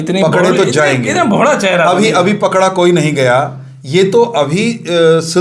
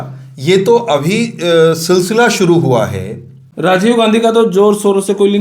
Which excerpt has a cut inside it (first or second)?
second